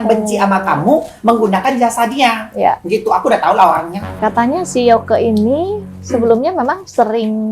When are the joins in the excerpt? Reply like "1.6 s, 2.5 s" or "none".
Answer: 4.2 s